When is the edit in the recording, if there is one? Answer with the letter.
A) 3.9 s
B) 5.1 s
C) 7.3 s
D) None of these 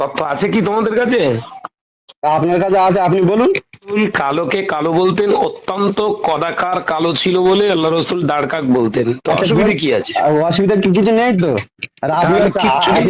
A